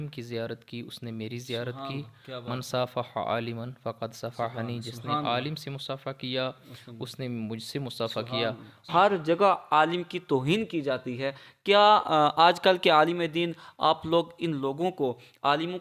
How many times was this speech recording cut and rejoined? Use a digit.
1